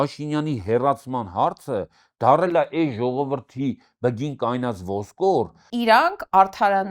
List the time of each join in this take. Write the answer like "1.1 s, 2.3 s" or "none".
5.6 s

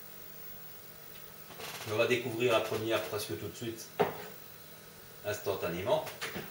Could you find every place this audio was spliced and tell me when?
5.6 s

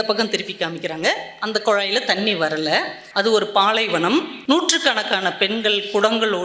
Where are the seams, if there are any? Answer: 3.0 s, 4.3 s

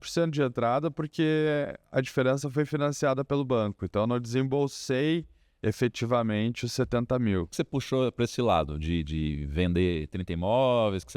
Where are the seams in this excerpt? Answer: 7.5 s

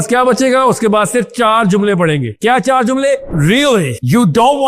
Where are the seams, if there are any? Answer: 3.3 s

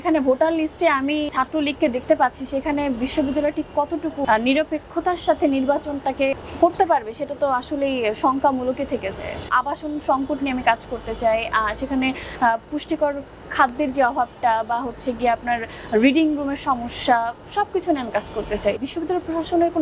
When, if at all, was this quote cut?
1.3 s, 4.2 s, 6.3 s, 9.5 s, 18.8 s

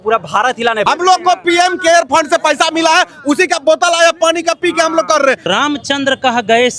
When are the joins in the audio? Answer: 0.8 s, 5.5 s

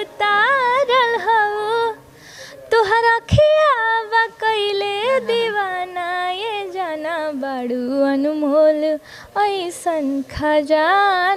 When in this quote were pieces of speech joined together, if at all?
none

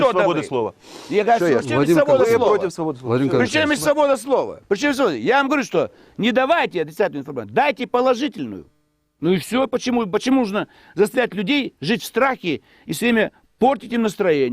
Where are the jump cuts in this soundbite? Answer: none

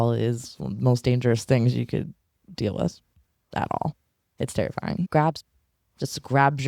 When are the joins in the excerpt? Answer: 5.1 s

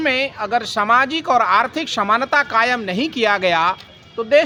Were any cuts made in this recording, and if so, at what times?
none

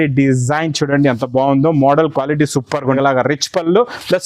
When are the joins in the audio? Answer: 3.0 s

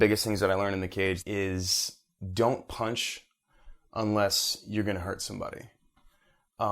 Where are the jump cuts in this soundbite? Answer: 1.2 s

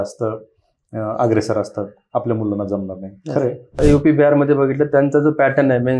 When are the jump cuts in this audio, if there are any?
3.8 s

